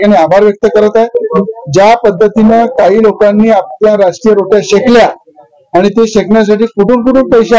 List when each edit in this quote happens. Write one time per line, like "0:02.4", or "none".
none

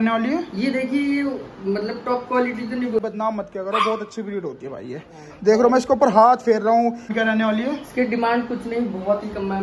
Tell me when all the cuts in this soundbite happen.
0:03.0
0:07.1

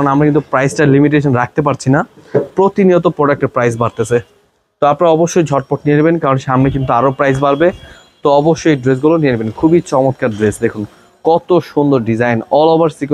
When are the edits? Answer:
none

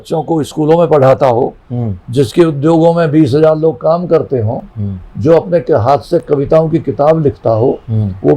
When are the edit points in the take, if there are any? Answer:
none

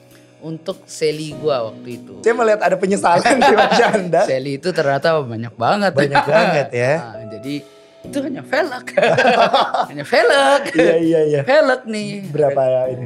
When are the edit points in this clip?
0:02.2

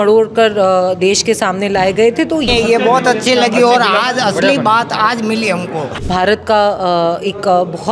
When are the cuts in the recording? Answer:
0:02.5
0:05.9

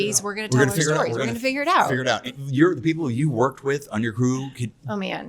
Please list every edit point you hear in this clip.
0:02.3

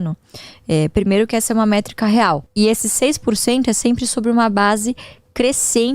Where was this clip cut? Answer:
0:02.5

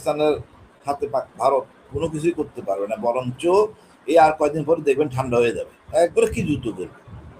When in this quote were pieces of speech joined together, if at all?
0:05.8

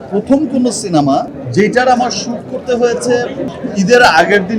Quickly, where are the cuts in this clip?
0:01.4
0:03.5

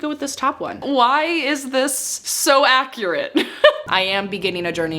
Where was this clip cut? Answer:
0:00.8
0:03.8

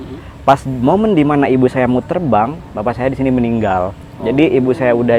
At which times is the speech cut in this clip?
none

